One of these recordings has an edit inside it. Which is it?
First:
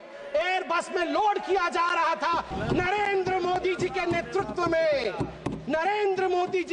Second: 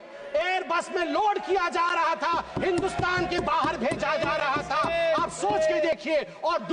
first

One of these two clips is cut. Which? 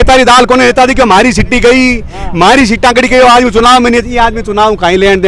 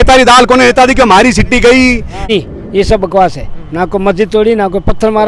second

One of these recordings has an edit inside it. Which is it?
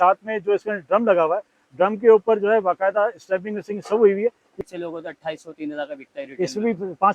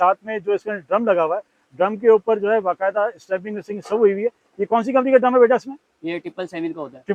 first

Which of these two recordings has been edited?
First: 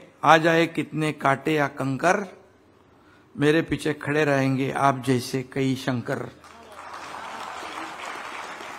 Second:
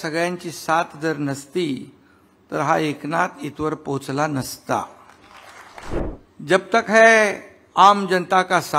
second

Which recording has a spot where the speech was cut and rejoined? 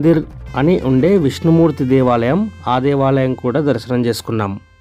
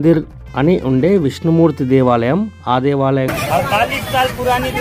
second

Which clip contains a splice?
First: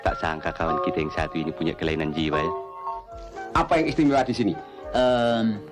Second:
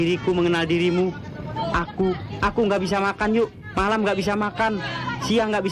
first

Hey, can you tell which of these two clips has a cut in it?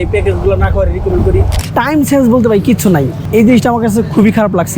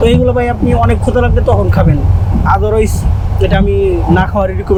first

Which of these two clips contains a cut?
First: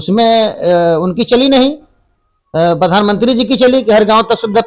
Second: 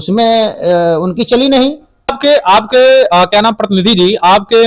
second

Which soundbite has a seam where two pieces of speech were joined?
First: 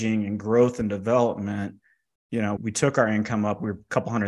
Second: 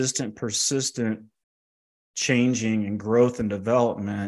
first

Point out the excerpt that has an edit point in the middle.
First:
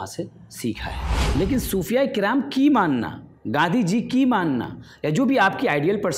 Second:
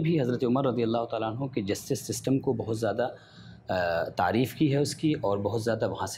first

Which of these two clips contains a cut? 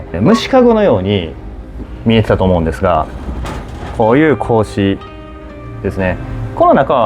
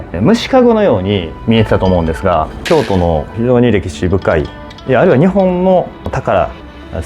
second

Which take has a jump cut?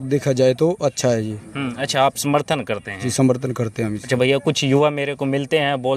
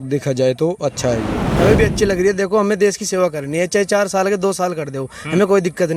second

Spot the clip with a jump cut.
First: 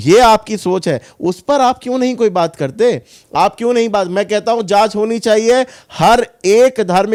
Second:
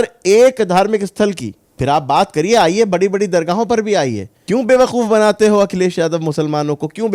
second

